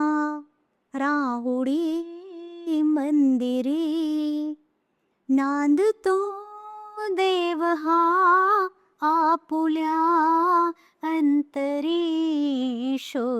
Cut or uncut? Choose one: uncut